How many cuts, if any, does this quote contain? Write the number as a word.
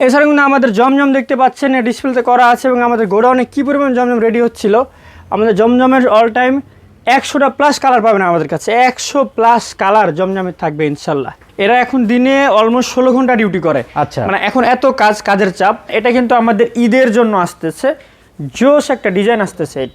two